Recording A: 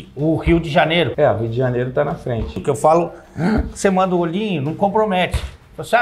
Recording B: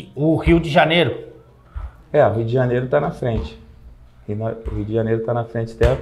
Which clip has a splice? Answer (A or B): A